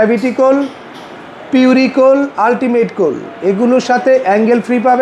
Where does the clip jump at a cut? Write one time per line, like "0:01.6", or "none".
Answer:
none

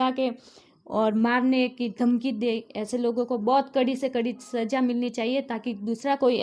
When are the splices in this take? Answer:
none

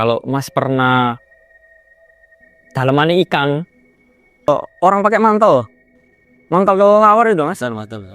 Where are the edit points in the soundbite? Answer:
0:04.5

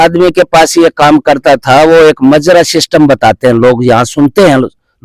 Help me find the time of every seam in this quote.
none

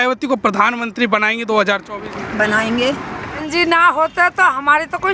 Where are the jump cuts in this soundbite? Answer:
0:03.4

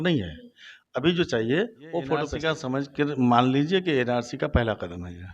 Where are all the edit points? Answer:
0:02.4

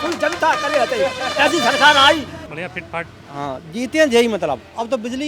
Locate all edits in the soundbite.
0:02.4

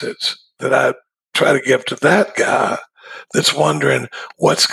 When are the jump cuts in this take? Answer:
none

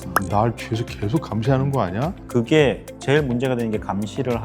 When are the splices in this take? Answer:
0:02.2

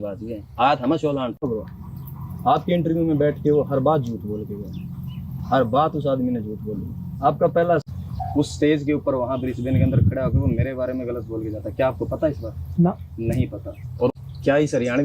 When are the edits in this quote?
0:01.4
0:07.8
0:14.2

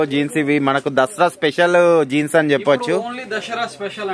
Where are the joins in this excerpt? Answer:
none

